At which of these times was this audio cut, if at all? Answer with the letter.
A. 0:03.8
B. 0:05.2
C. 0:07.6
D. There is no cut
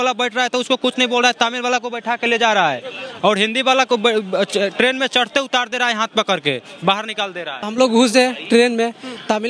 C